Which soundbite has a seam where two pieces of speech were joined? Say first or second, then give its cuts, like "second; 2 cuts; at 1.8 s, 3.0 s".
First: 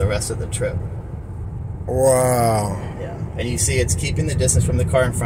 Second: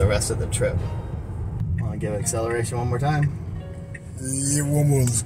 second; 1 cut; at 1.6 s